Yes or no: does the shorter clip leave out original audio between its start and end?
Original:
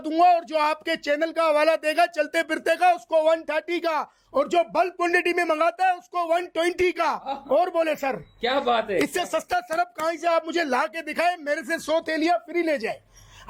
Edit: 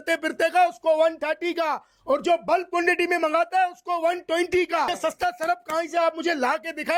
yes